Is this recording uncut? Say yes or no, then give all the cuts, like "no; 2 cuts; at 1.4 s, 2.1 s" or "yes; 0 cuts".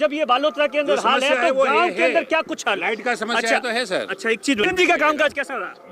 no; 1 cut; at 4.6 s